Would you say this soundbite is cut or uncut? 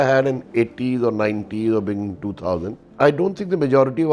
uncut